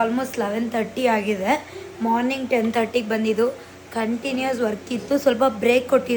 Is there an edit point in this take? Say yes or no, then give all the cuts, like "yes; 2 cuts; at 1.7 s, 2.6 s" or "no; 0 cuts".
no; 0 cuts